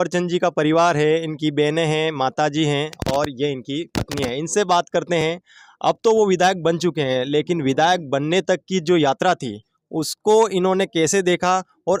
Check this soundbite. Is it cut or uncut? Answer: uncut